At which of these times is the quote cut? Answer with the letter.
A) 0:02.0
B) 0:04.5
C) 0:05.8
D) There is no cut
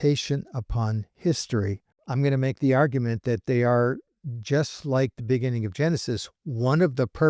A